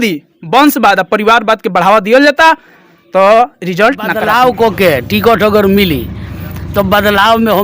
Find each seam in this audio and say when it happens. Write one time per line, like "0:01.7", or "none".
0:04.2

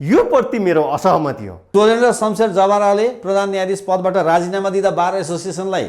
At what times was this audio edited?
0:01.6

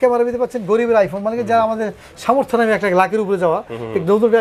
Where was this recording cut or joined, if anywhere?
none

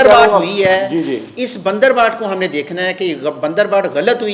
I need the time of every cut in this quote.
none

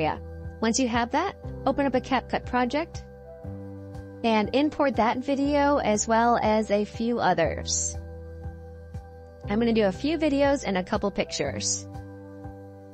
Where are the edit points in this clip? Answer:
0:07.6
0:09.5
0:11.7

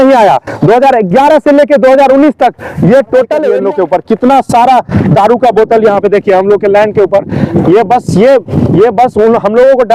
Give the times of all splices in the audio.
0:03.5

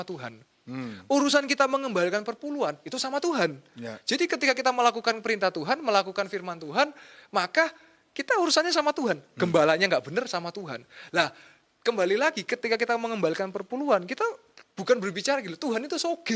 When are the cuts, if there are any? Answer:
none

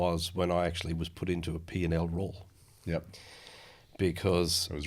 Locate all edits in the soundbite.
none

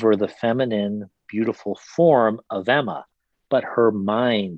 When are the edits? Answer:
none

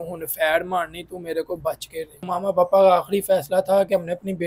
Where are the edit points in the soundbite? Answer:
0:02.3

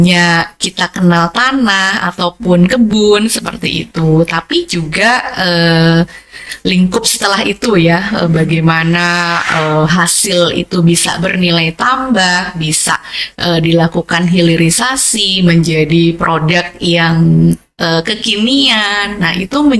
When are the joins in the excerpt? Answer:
none

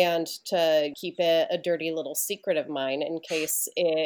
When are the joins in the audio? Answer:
0:01.0

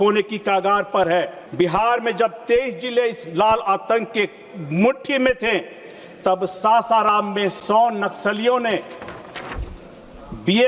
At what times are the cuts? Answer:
0:01.4

